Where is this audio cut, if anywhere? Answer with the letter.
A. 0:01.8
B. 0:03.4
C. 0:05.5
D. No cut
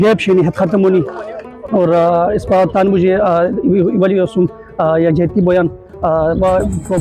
D